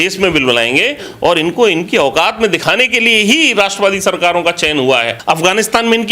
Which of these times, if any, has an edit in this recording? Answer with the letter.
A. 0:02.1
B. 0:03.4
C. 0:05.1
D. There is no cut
C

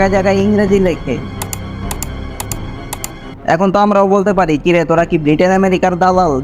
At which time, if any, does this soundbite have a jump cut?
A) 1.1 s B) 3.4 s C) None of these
B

